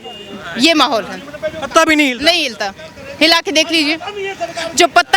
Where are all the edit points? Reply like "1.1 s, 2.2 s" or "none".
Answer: none